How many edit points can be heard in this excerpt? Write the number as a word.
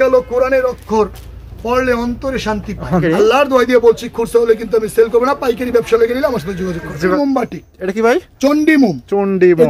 two